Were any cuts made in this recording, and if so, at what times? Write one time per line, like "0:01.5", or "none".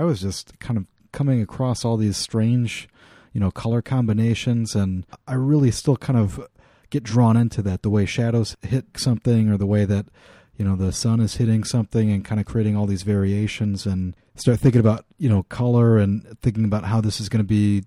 none